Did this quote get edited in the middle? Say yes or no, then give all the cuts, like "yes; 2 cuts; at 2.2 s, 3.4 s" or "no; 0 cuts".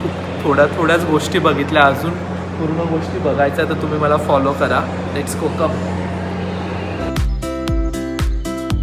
no; 0 cuts